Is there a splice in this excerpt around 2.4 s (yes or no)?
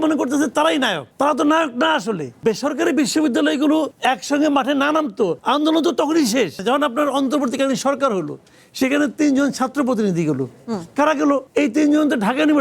yes